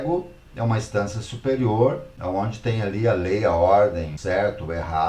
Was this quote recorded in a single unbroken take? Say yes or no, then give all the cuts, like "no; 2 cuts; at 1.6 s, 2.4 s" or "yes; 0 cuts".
no; 2 cuts; at 2.1 s, 4.1 s